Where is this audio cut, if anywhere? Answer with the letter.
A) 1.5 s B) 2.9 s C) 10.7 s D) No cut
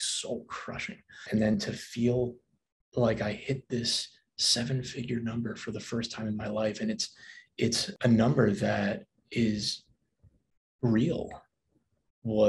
A